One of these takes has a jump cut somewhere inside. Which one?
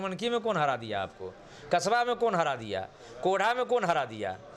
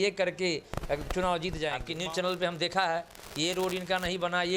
second; 1 cut; at 1.9 s

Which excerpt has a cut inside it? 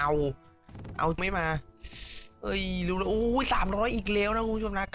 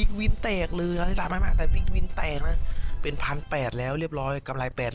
first; 1 cut; at 1.2 s

